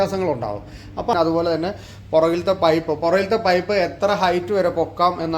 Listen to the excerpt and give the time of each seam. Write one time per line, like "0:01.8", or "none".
0:01.1